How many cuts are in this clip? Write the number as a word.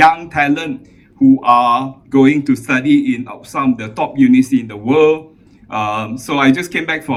zero